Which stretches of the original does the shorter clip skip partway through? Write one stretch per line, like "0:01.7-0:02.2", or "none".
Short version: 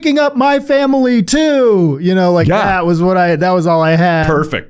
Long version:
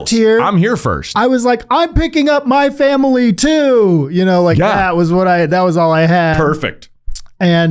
none